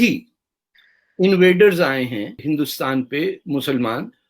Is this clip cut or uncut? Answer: cut